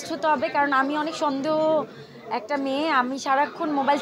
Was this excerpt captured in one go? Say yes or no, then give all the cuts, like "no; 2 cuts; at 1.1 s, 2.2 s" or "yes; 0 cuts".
yes; 0 cuts